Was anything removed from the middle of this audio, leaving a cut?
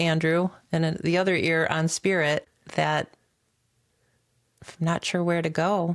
yes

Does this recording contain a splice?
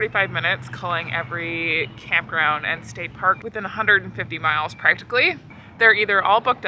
no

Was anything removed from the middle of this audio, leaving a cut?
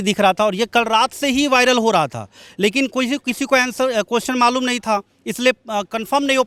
no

